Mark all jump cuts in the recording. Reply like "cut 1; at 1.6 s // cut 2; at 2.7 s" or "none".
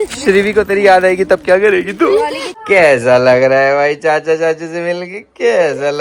cut 1; at 2.4 s